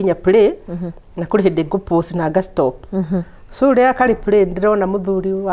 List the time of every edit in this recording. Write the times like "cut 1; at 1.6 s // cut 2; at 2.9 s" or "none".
none